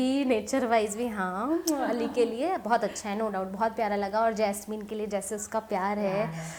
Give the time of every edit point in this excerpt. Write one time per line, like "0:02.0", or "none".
none